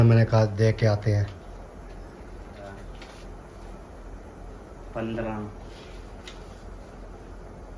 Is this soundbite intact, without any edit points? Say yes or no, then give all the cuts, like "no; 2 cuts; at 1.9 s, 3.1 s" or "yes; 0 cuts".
no; 1 cut; at 2.7 s